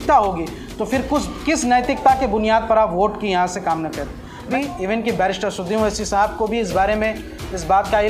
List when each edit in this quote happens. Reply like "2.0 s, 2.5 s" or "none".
4.5 s